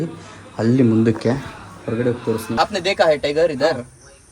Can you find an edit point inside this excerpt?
yes; 1 cut; at 2.6 s

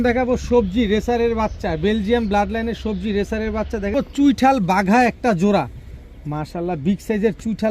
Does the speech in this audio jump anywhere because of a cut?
yes; 1 cut; at 3.9 s

